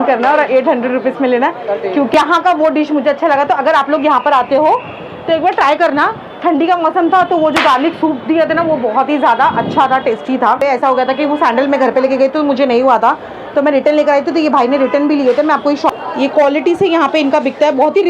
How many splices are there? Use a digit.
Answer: 3